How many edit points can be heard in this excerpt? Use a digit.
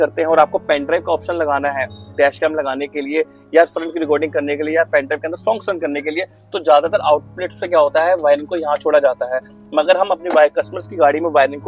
0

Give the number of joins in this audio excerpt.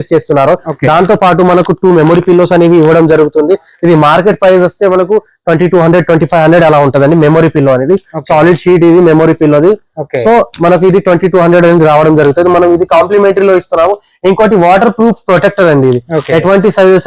0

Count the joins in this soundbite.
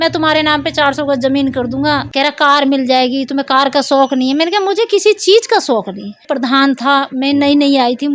2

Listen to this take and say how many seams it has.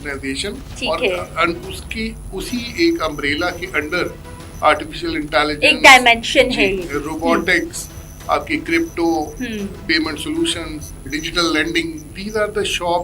1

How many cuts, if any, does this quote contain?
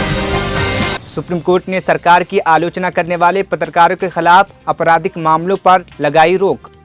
0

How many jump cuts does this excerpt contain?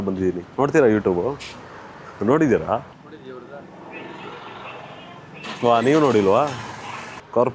0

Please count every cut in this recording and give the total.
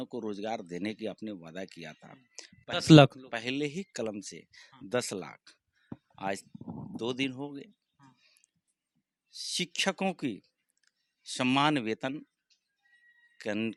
0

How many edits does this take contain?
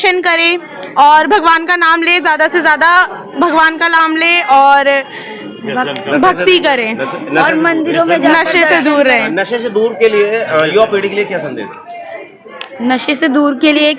0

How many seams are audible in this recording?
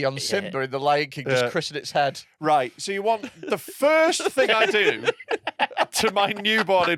0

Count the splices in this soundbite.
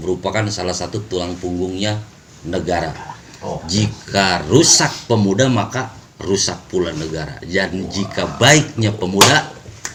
0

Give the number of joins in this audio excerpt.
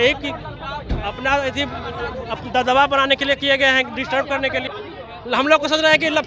1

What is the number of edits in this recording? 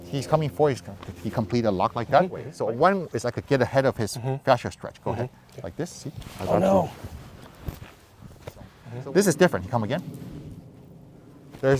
2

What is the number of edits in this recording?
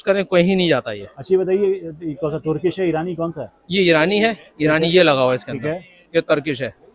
0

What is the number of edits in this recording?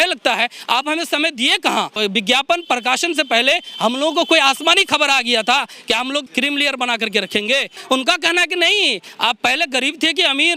3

